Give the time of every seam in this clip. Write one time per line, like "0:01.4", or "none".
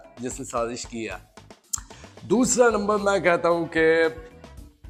none